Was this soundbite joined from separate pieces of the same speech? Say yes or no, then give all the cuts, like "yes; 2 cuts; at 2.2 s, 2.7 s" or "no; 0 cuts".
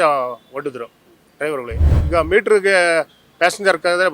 yes; 1 cut; at 1.9 s